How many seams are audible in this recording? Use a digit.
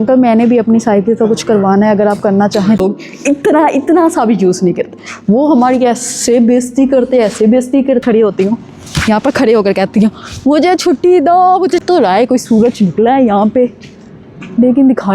3